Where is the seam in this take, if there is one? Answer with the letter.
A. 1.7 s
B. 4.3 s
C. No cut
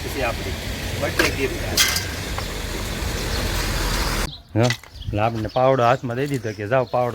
B